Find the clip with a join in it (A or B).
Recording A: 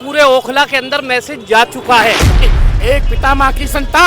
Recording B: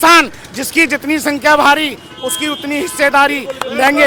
A